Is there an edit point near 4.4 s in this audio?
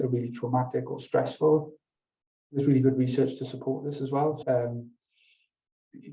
yes; 1 cut; at 4.4 s

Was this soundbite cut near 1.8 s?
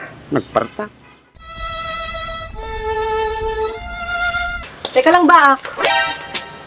no; 1 cut; at 4.6 s

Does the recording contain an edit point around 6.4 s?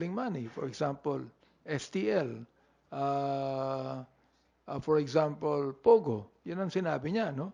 no; 0 cuts

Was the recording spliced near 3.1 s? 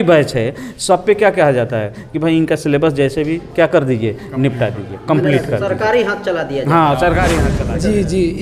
no; 1 cut; at 7.5 s

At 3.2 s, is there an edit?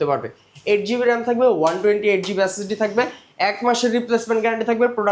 no; 0 cuts

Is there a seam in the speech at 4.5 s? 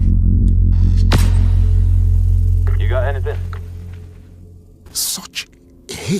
yes; 1 cut; at 4.5 s

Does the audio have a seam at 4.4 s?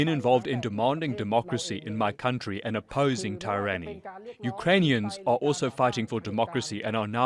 no; 0 cuts

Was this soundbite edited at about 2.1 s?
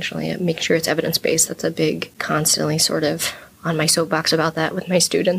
yes; 1 cut; at 2.1 s

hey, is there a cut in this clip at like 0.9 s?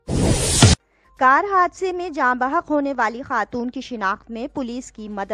yes; 1 cut; at 0.9 s

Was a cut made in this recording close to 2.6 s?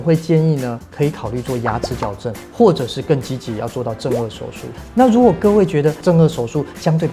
no; 2 cuts; at 4.8 s, 6.0 s

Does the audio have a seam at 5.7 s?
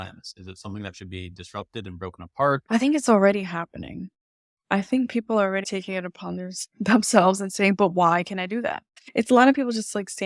yes; 3 cuts; at 2.6 s, 5.7 s, 9.0 s

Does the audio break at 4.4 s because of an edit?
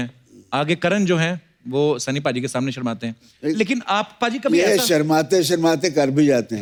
no; 0 cuts

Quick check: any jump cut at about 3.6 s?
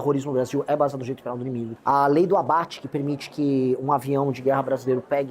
no; 1 cut; at 1.7 s

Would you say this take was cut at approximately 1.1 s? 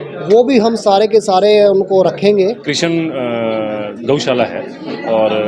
no; 1 cut; at 2.7 s

